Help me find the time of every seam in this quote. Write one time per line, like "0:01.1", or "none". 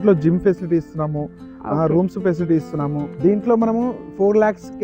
0:03.1